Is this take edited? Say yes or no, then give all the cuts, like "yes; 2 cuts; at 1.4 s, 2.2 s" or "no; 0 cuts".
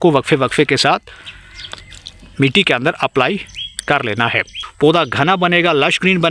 yes; 1 cut; at 4.6 s